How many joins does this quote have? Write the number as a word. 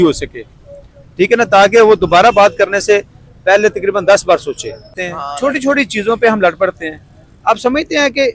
one